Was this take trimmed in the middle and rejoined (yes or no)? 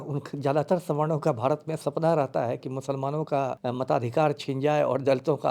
yes